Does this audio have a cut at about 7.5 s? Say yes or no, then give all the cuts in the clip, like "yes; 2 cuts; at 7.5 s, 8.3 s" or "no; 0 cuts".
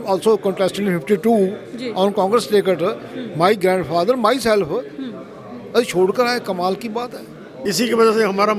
yes; 1 cut; at 7.5 s